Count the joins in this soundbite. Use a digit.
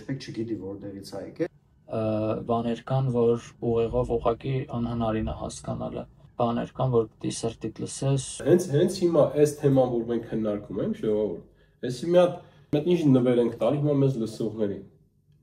4